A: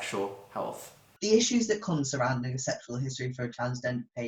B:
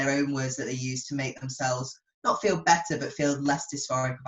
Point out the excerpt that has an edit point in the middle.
A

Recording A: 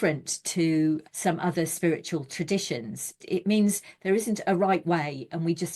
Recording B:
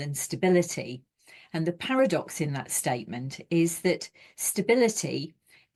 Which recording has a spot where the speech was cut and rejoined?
A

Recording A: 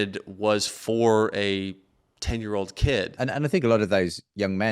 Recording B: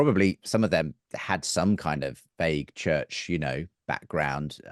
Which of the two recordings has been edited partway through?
A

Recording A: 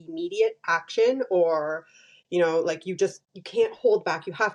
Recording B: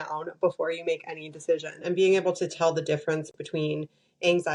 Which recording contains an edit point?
B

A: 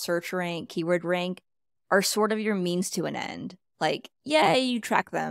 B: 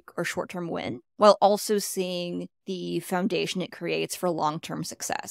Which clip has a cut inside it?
B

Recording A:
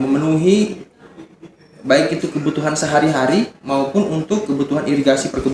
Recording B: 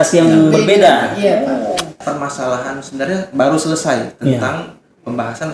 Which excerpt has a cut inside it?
B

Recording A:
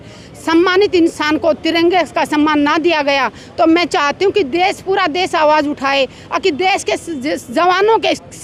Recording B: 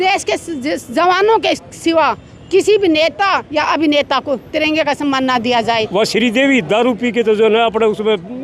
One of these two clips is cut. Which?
B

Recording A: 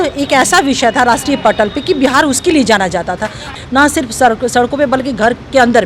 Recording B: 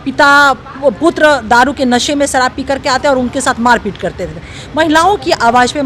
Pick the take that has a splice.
A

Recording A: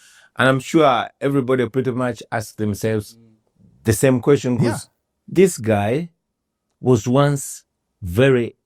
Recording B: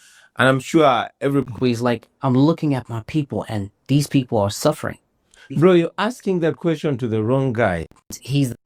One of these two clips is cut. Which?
A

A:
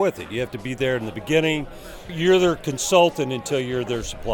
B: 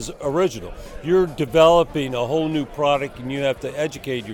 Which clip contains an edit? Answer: A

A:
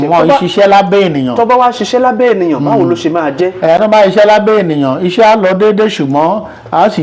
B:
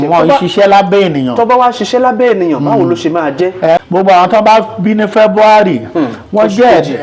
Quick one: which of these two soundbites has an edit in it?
B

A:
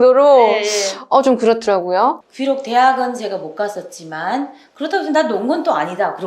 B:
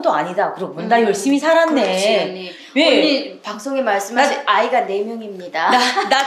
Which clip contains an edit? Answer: A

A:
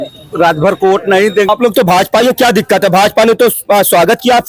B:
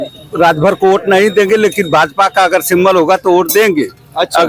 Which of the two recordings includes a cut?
A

